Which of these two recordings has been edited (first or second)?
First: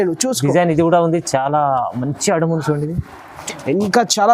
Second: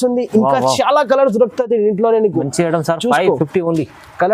first